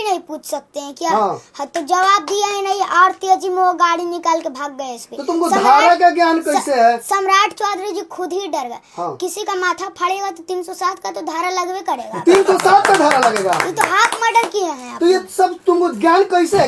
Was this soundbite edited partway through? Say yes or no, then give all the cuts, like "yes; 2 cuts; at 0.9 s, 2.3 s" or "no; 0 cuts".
no; 0 cuts